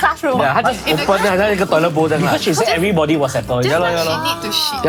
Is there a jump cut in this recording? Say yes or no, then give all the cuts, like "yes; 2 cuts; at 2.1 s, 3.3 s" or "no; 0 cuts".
no; 0 cuts